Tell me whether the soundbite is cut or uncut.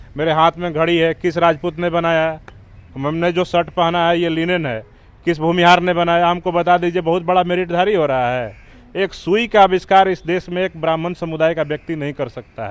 uncut